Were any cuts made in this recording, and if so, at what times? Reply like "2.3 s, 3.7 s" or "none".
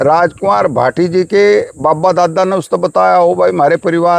none